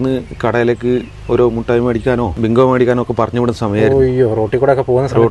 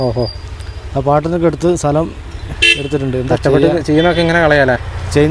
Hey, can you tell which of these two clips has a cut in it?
first; 1 cut; at 2.3 s

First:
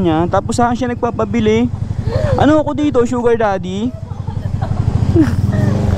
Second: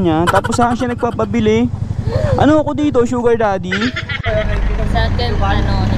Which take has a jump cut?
second; 1 cut; at 4.1 s

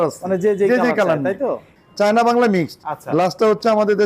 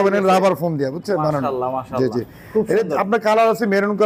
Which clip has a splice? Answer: first; 1 cut; at 1.7 s

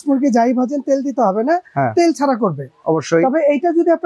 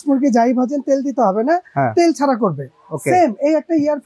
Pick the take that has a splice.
first; 1 cut; at 2.7 s

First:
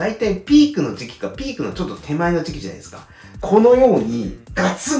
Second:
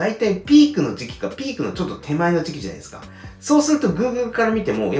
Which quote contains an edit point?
first; 1 cut; at 3.3 s

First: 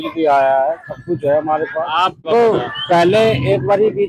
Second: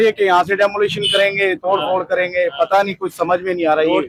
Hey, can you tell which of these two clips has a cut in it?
first; 1 cut; at 2.3 s

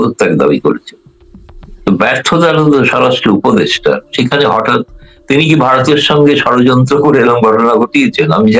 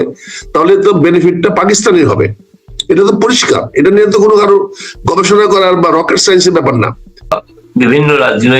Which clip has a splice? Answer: second; 1 cut; at 7.3 s

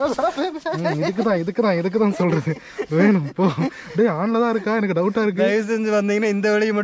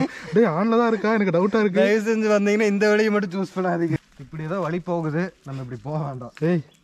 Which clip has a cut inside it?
second; 1 cut; at 4.2 s

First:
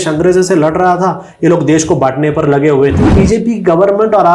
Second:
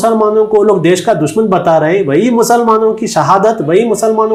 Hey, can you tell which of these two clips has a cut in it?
first; 1 cut; at 3.1 s

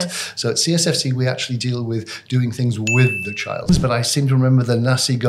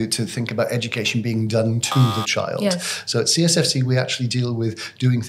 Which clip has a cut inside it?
first; 1 cut; at 3.7 s

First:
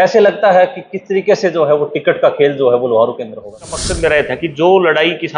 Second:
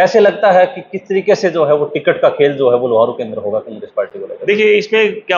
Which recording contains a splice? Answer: first; 1 cut; at 3.8 s

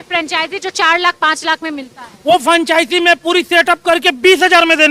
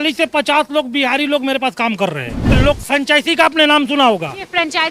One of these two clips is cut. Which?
second; 1 cut; at 2.5 s

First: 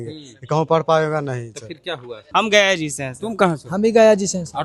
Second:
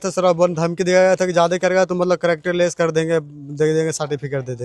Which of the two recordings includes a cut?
first; 1 cut; at 2.2 s

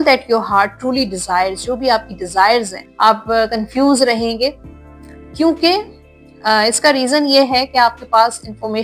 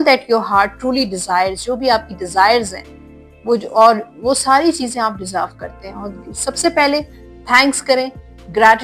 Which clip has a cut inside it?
first; 1 cut; at 2.8 s

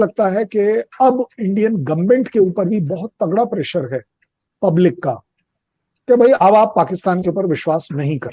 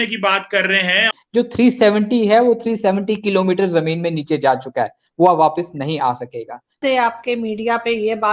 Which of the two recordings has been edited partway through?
second; 2 cuts; at 1.1 s, 6.8 s

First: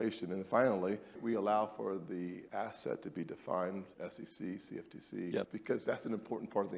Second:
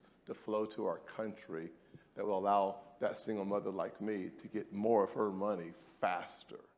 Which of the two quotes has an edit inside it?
first; 4 cuts; at 1.2 s, 2.4 s, 3.9 s, 5.5 s

